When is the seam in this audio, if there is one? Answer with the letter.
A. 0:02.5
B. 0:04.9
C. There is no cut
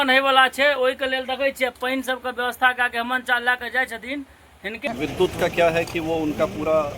B